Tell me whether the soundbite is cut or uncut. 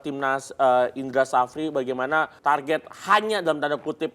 cut